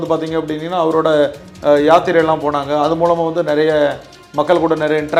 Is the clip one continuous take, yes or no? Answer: yes